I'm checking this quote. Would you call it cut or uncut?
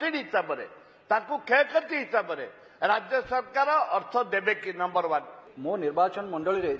cut